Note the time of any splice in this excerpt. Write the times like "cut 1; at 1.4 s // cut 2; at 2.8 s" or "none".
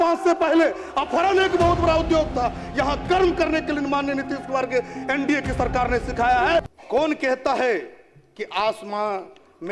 cut 1; at 6.8 s